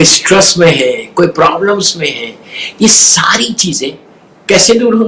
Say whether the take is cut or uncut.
uncut